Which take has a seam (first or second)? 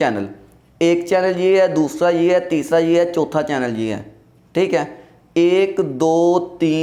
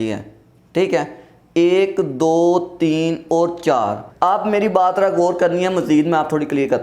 second